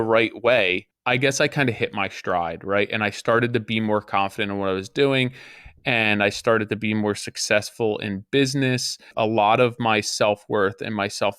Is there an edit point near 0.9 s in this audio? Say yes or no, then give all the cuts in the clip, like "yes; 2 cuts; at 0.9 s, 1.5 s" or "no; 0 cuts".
yes; 2 cuts; at 0.9 s, 9.1 s